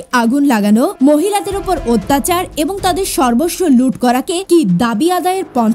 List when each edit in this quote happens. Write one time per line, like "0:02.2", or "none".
0:00.9
0:04.4